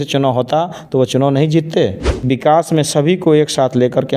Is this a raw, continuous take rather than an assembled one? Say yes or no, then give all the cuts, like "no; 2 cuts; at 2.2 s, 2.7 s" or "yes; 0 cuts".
no; 1 cut; at 2.3 s